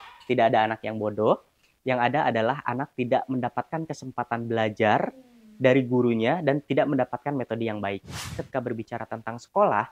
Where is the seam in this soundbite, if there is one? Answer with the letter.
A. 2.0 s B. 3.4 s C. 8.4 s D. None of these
C